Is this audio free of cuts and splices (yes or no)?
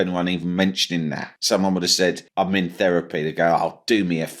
no